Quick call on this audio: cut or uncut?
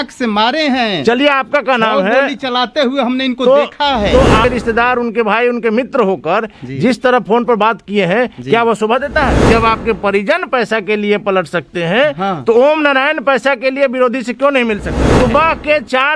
cut